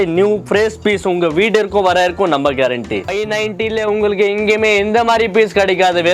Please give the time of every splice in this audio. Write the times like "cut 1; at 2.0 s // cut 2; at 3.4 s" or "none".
cut 1; at 3.1 s